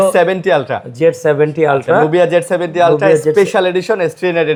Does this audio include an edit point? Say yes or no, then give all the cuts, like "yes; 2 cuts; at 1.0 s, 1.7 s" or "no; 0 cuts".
no; 0 cuts